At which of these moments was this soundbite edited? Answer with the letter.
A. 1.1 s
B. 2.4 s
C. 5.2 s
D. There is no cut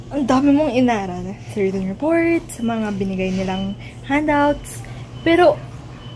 D